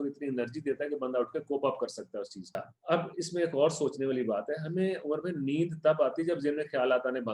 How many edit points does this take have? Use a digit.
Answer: 1